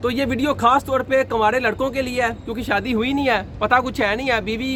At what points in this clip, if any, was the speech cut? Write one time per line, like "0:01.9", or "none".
none